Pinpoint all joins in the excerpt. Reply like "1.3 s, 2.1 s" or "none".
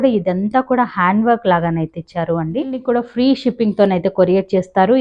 2.8 s